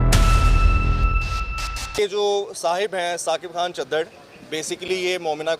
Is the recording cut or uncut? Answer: cut